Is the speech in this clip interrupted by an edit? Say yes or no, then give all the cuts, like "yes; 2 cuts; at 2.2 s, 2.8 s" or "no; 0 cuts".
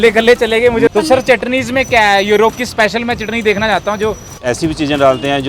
yes; 2 cuts; at 0.9 s, 4.3 s